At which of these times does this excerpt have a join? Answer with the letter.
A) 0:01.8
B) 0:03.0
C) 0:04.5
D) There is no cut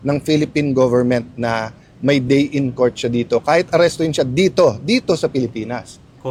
D